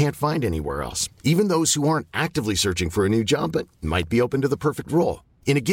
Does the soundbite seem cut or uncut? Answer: uncut